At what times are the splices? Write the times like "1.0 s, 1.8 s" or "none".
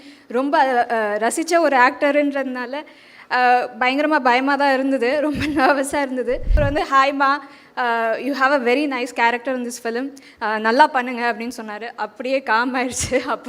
6.5 s